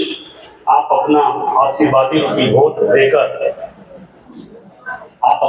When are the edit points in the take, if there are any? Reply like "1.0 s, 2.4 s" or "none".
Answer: none

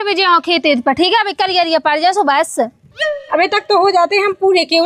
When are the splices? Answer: none

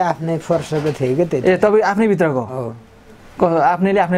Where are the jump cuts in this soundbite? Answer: none

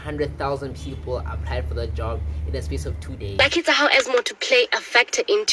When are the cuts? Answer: 3.3 s

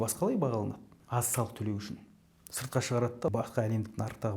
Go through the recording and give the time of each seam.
0.9 s, 3.3 s

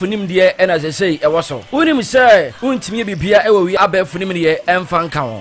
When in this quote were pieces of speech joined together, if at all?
3.8 s

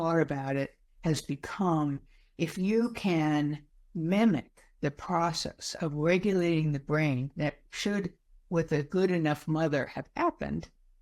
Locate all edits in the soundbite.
none

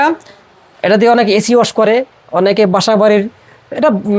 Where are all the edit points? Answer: none

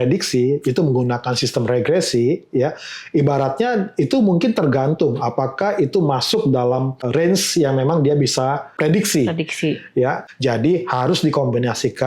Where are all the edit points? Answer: 7.0 s, 8.7 s, 10.2 s

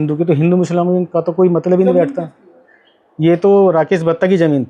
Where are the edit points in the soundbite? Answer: none

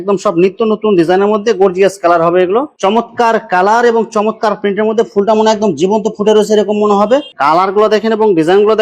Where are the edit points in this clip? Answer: 2.7 s, 7.3 s

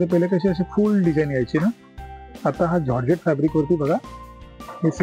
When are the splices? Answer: none

